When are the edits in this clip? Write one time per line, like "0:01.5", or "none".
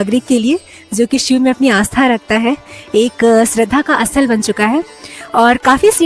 none